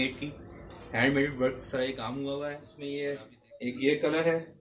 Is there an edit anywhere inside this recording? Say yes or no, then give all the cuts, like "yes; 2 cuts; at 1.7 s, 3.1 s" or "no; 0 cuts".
yes; 1 cut; at 2.7 s